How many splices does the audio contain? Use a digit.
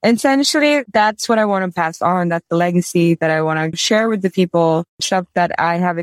3